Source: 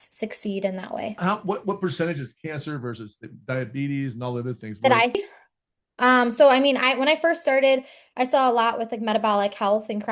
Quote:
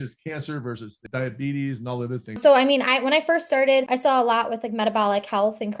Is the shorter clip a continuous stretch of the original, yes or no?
no